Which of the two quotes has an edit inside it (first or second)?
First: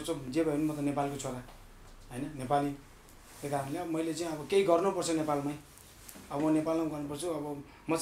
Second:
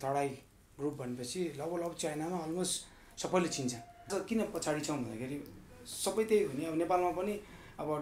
second